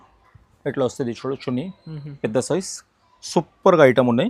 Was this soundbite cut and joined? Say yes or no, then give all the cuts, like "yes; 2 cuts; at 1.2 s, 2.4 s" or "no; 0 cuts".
no; 0 cuts